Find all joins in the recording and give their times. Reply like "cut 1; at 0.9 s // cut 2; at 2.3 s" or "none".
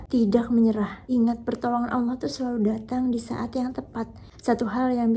cut 1; at 1.0 s